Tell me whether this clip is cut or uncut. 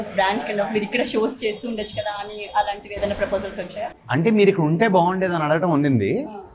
uncut